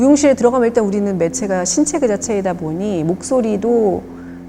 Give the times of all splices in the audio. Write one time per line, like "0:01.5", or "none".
none